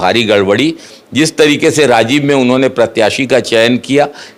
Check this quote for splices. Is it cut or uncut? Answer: uncut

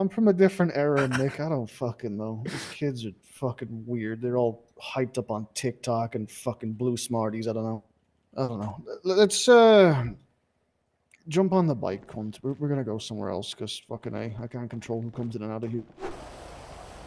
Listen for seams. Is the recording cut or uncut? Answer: uncut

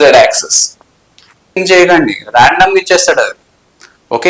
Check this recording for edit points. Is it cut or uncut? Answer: cut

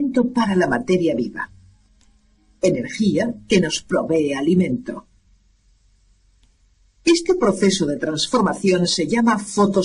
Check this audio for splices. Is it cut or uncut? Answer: uncut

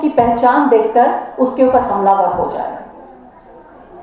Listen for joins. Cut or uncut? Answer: uncut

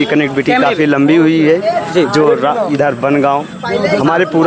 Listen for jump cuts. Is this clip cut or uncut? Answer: uncut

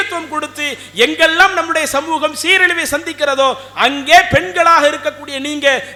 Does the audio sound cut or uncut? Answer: uncut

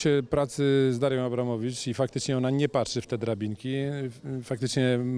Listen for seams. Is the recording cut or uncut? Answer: uncut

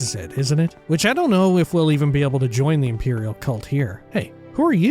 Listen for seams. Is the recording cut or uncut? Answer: cut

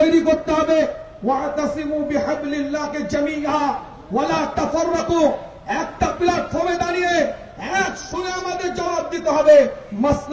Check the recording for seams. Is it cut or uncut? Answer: uncut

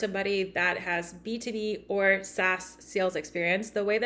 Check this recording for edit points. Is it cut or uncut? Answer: uncut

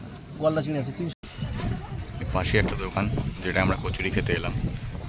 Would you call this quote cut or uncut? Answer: cut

